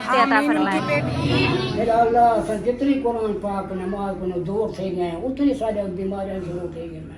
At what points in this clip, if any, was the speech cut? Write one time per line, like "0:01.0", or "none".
0:01.0